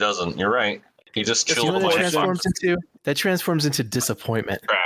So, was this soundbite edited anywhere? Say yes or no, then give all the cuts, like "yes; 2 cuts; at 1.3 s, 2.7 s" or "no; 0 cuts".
yes; 1 cut; at 0.9 s